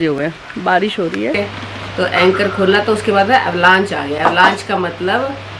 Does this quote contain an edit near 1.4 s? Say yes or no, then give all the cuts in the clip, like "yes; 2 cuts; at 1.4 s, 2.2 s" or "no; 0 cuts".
yes; 1 cut; at 1.4 s